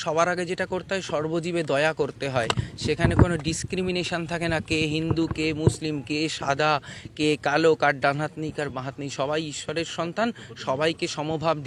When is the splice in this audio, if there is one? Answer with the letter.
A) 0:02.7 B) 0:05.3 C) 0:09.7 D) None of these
D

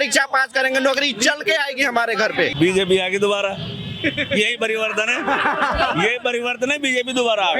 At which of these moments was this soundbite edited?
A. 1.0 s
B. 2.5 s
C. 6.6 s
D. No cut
B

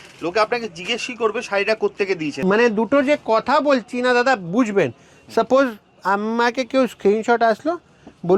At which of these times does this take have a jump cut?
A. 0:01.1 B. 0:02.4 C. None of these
B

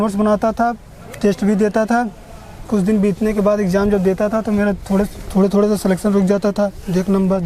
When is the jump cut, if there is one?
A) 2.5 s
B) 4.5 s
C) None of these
C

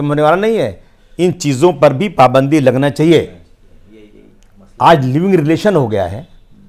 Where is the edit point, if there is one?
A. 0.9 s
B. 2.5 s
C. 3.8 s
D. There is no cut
D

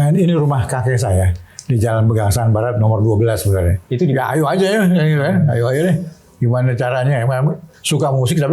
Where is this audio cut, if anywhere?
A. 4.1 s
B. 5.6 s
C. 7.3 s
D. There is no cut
A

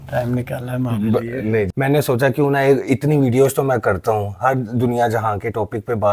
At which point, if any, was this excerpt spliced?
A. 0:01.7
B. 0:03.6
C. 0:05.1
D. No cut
A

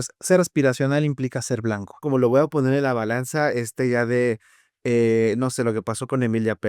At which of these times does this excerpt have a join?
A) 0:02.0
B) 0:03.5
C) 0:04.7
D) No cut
A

